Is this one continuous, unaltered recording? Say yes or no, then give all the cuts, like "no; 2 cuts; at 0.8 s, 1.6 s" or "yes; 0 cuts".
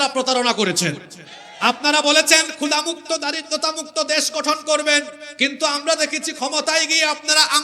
yes; 0 cuts